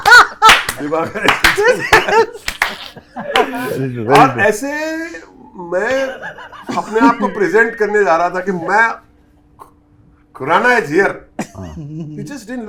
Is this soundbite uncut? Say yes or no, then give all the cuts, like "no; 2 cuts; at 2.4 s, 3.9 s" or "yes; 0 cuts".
yes; 0 cuts